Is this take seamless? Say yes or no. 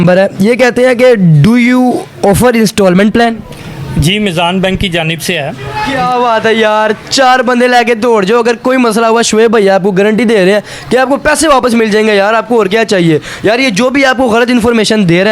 no